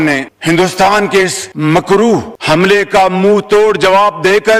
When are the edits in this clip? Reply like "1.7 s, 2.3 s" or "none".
none